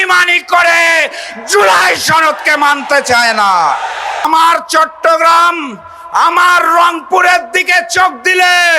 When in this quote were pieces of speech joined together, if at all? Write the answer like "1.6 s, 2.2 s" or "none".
4.2 s